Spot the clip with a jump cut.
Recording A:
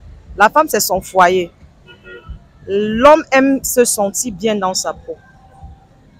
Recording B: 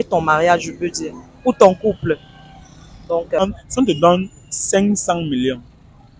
B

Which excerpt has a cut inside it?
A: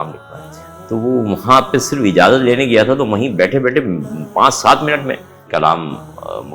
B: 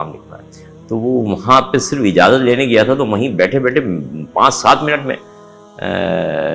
A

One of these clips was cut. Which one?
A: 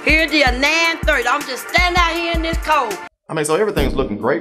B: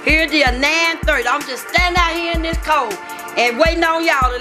A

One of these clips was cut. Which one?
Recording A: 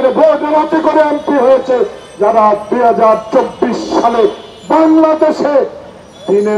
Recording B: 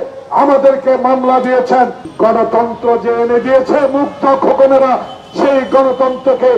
B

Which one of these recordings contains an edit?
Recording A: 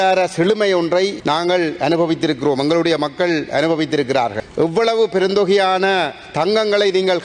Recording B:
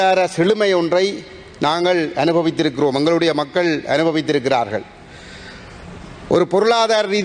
A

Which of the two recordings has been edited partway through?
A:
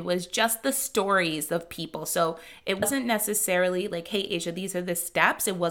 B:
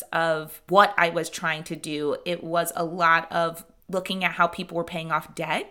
A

